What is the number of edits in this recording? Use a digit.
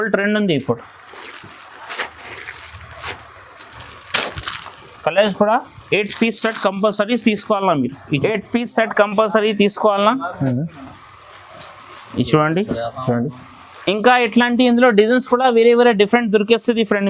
1